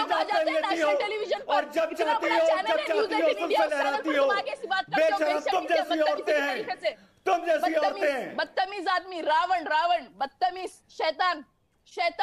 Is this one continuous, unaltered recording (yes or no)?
yes